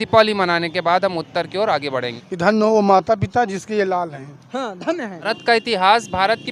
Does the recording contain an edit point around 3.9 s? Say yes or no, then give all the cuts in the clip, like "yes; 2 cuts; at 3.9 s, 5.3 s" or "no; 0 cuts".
no; 2 cuts; at 2.2 s, 5.3 s